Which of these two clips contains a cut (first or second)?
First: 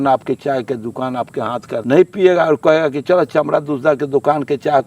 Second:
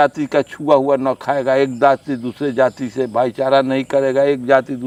first